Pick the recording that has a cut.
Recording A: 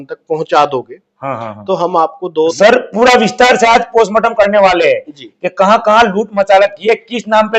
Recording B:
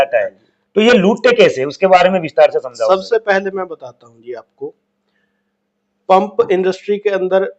A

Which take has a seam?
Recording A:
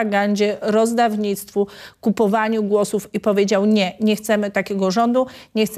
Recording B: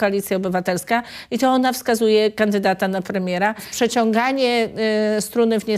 B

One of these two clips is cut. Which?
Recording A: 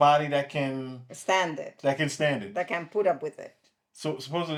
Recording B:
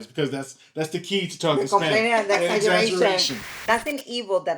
B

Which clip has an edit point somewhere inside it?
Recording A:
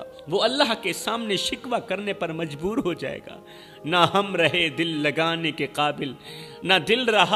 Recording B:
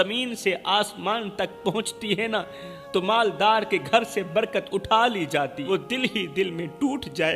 B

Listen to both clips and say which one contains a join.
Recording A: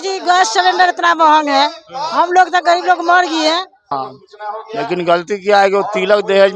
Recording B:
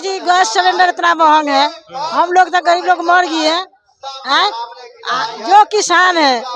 A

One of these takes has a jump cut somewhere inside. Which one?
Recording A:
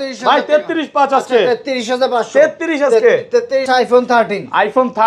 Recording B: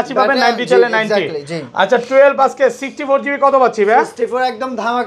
A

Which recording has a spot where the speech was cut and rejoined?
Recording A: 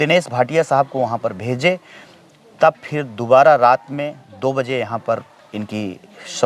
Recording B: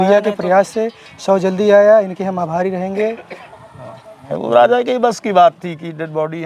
B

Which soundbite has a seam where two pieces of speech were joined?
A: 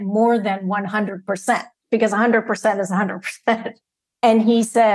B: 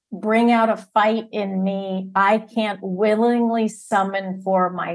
A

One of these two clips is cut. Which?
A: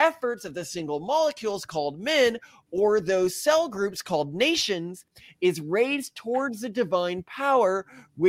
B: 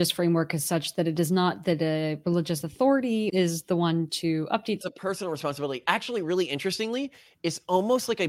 B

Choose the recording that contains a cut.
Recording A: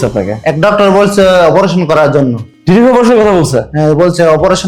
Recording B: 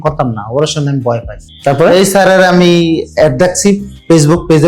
B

